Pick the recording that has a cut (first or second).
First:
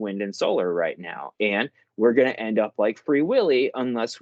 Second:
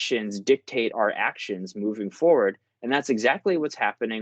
second